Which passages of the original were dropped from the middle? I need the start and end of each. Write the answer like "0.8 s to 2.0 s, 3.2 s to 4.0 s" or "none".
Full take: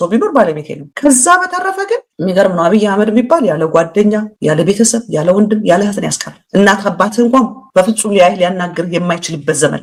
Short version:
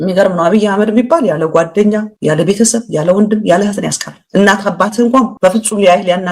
7.5 s to 7.7 s